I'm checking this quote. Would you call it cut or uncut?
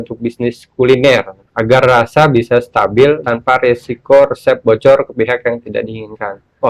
cut